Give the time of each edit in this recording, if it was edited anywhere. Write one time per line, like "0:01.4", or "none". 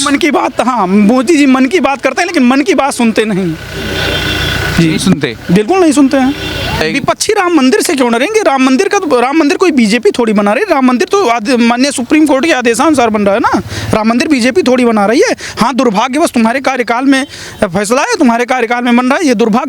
0:06.8